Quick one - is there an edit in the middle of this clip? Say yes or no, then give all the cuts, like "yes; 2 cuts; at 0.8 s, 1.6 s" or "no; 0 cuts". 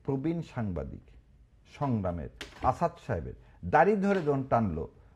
no; 0 cuts